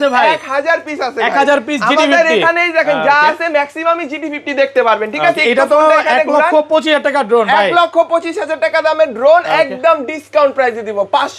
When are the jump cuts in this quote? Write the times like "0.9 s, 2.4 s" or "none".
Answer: none